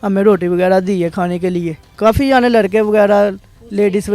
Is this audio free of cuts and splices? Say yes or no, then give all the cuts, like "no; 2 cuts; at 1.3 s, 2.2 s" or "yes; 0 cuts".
no; 1 cut; at 1.8 s